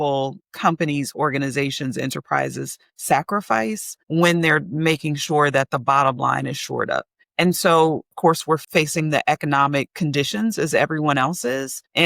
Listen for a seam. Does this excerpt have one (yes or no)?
yes